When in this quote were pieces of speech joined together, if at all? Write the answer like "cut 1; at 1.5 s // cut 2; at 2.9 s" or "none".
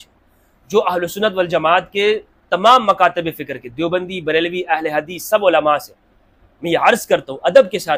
none